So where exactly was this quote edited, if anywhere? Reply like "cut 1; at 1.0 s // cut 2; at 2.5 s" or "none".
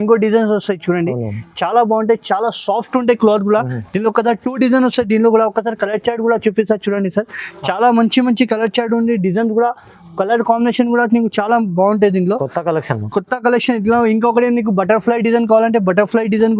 none